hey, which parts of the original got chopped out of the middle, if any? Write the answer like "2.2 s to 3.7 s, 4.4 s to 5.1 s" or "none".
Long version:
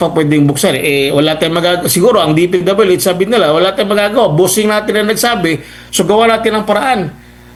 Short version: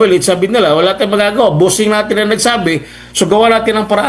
none